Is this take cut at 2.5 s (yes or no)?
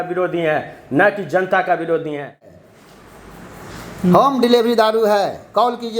yes